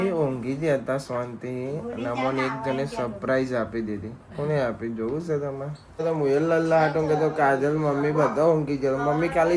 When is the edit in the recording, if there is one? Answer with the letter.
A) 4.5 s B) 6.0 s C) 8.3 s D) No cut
B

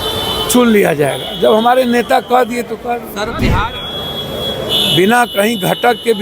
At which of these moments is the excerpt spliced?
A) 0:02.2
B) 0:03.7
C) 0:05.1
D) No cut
B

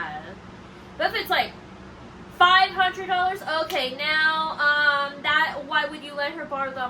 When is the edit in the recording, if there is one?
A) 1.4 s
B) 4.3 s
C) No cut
C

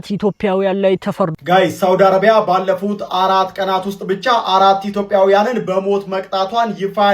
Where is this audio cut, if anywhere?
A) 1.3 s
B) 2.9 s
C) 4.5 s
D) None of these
A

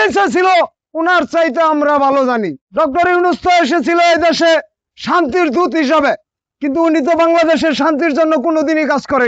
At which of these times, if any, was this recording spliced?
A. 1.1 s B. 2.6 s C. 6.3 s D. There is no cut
B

